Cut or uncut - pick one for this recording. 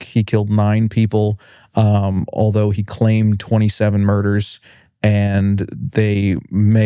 uncut